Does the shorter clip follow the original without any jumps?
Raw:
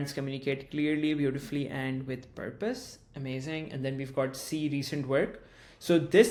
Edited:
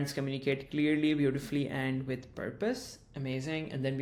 yes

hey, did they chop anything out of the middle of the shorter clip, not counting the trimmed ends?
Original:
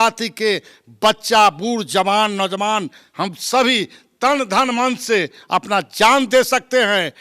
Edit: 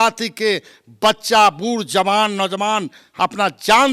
yes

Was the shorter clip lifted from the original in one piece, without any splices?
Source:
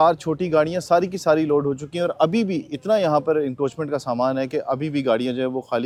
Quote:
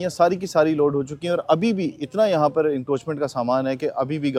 yes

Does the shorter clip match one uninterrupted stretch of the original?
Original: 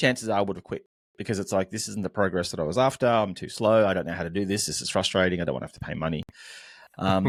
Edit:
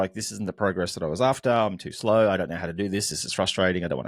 yes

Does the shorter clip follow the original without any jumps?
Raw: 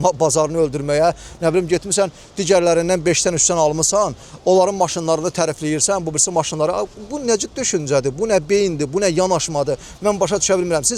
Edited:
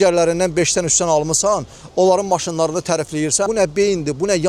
no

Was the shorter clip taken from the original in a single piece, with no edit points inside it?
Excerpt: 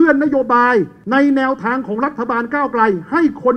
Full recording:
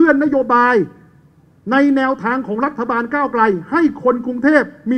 no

